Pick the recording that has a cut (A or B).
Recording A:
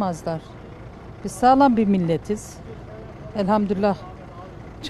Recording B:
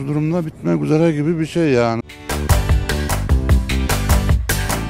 B